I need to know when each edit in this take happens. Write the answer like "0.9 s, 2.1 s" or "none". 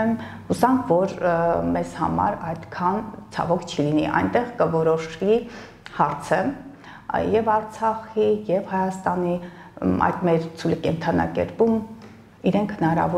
none